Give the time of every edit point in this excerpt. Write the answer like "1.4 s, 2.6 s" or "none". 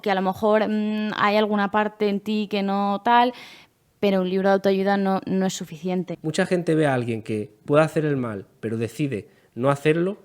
6.2 s